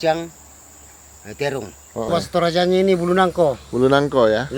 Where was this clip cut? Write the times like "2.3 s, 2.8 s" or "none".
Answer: 2.1 s